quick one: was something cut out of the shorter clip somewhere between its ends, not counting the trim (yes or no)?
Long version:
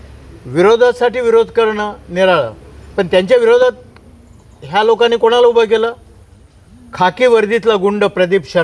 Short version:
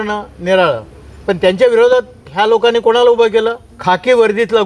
yes